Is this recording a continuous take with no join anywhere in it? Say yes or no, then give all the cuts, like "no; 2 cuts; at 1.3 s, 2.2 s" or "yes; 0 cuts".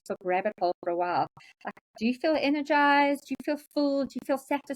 yes; 0 cuts